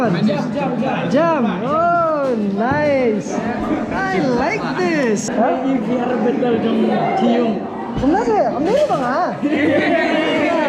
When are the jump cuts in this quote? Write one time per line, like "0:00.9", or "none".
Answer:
0:05.3